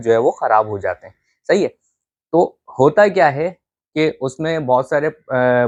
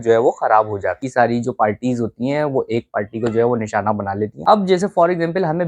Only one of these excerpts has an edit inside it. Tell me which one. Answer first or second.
second